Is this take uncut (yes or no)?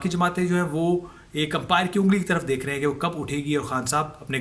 yes